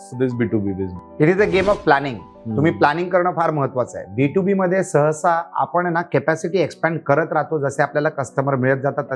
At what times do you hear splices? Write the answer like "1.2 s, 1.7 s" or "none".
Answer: 1.0 s